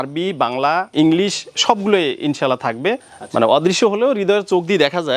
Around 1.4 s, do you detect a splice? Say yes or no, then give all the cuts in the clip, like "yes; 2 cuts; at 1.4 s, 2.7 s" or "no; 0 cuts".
no; 1 cut; at 3.1 s